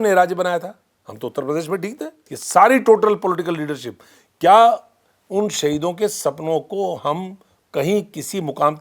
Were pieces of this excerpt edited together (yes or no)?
yes